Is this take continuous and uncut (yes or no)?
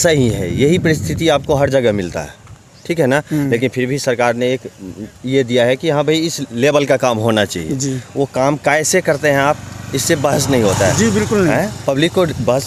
yes